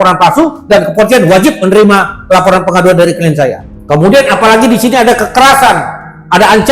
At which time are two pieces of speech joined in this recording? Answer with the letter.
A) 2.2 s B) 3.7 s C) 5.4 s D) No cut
B